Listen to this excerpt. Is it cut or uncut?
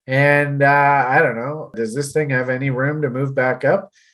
cut